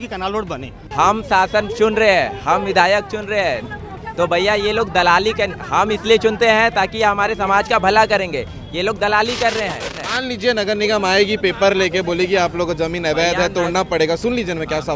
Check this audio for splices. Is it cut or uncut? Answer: cut